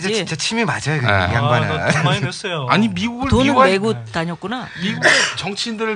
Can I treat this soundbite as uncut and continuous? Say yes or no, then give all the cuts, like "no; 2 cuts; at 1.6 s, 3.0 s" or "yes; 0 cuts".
yes; 0 cuts